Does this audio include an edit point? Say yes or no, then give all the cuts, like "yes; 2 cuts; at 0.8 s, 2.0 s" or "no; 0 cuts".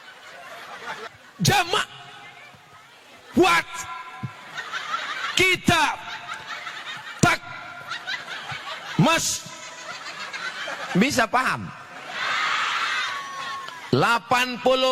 yes; 1 cut; at 1.1 s